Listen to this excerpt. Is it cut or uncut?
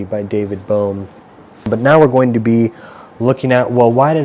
cut